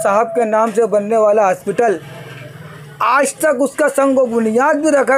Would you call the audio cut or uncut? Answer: uncut